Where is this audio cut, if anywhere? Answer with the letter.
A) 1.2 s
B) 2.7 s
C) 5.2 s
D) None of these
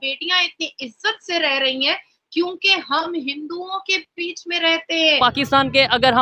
C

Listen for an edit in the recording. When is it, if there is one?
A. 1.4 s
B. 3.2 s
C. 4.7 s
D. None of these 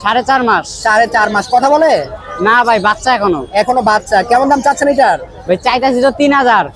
D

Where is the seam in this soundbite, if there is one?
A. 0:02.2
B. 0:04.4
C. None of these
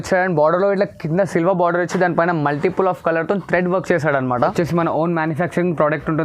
B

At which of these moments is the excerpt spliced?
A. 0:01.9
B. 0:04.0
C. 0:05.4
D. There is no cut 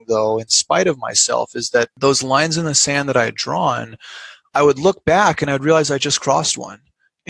A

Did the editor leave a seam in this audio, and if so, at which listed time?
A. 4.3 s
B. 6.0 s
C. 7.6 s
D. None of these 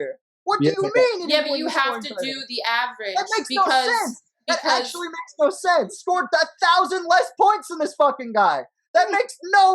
B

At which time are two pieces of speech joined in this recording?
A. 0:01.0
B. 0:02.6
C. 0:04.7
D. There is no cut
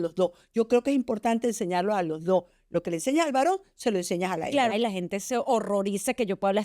C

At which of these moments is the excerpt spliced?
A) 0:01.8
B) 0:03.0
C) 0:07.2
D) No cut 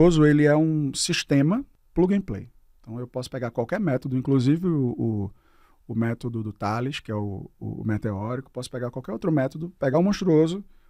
A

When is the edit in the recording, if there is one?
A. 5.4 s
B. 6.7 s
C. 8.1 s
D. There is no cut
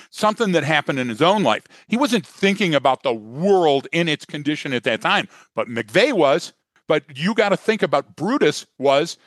B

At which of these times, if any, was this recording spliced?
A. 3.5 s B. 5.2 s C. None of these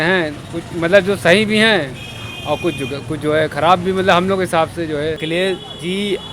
B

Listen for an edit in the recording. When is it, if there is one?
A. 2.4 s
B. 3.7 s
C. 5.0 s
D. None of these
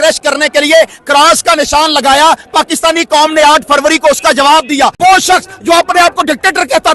C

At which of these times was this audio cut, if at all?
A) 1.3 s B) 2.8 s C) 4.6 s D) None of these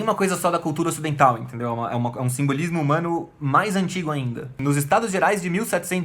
C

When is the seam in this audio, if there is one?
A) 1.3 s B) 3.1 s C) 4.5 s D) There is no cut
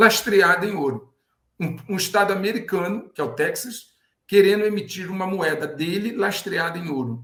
D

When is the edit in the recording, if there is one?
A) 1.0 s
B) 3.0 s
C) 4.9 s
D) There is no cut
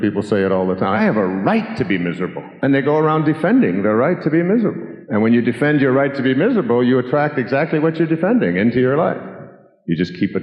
A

